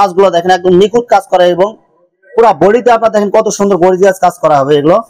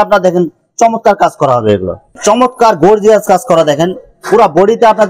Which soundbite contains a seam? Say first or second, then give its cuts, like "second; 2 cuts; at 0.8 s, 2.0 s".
second; 1 cut; at 2.2 s